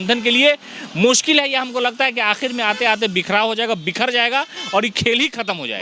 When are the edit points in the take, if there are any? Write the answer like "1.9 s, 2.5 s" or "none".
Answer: none